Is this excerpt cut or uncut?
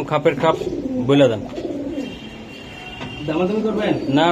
uncut